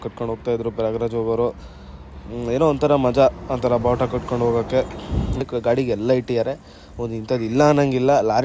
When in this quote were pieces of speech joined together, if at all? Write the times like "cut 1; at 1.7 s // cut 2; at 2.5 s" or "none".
cut 1; at 5.4 s